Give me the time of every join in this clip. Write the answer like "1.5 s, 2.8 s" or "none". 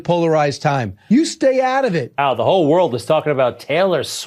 0.9 s, 2.1 s